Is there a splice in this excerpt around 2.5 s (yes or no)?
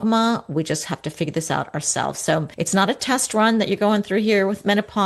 yes